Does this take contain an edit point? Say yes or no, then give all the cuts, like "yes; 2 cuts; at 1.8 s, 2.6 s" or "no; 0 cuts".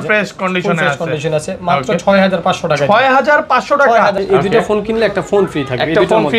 yes; 1 cut; at 4.2 s